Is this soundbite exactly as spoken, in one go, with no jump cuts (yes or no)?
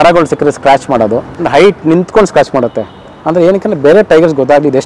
no